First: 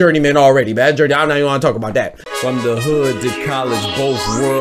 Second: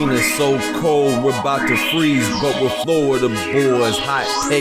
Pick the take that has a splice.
first; 1 cut; at 2.2 s

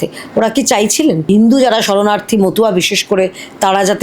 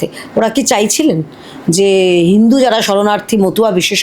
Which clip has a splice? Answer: first; 1 cut; at 1.3 s

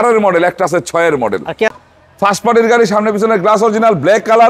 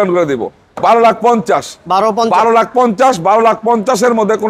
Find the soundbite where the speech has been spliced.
first; 1 cut; at 1.7 s

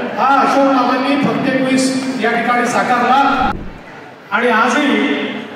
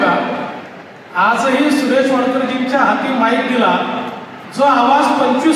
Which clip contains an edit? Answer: first; 1 cut; at 3.5 s

